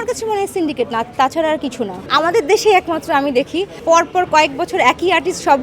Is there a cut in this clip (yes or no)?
yes